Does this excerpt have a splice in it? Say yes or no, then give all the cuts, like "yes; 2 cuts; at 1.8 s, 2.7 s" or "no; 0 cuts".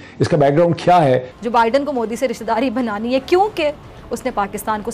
yes; 1 cut; at 1.3 s